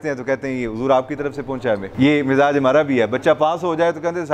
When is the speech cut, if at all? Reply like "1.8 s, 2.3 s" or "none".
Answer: 1.9 s

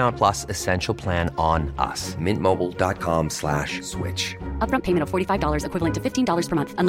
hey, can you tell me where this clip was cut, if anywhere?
none

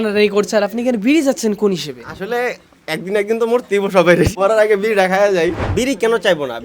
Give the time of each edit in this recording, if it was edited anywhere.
4.3 s, 5.6 s

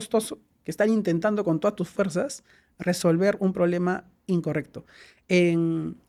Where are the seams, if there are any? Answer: none

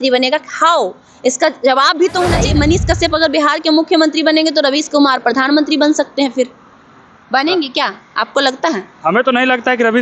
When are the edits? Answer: 2.4 s

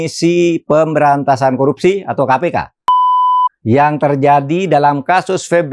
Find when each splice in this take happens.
3.0 s

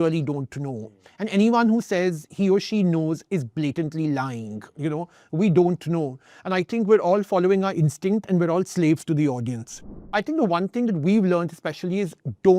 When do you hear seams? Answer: 10.1 s

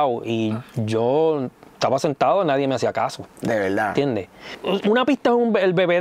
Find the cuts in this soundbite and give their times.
4.5 s

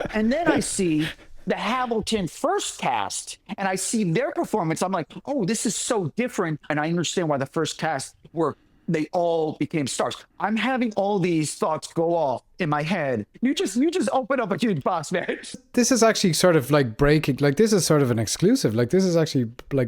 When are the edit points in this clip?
6.7 s, 13.3 s, 15.7 s

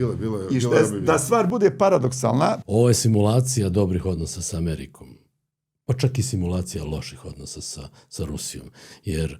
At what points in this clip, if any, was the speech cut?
2.6 s

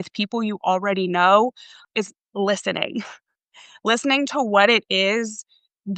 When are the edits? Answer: none

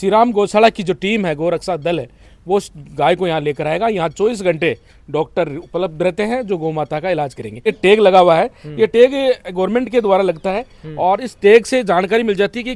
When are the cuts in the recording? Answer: 7.7 s

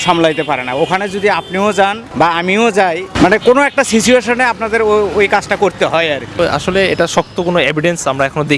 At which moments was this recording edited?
2.0 s, 3.1 s, 6.3 s

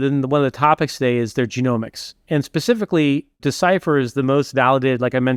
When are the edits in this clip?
none

